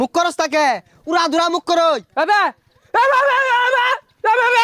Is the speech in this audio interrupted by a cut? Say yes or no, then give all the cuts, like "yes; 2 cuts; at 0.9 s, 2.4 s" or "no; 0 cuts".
no; 0 cuts